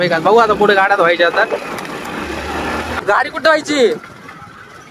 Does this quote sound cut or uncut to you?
cut